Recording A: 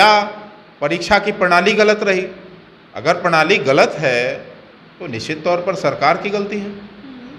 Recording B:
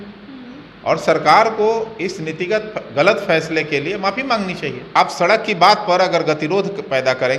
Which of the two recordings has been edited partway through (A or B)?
B